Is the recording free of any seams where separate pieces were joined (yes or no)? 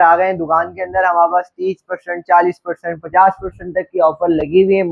yes